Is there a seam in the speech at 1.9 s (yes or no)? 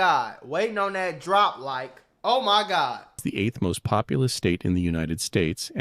no